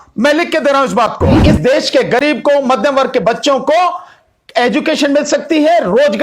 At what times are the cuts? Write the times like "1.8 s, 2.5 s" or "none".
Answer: 1.4 s